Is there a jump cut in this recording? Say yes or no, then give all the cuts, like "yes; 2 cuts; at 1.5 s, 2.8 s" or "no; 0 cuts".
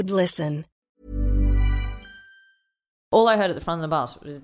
yes; 1 cut; at 3.0 s